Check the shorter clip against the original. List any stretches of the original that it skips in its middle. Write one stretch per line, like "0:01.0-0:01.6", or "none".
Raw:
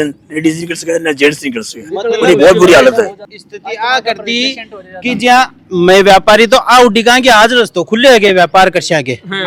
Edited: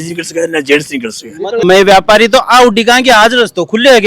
0:02.2-0:05.8